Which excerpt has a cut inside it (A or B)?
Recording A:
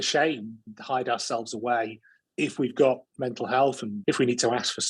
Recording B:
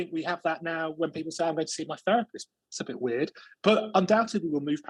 A